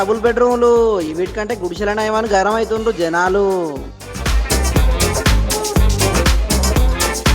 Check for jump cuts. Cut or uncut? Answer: uncut